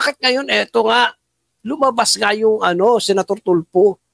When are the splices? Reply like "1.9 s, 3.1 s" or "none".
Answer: none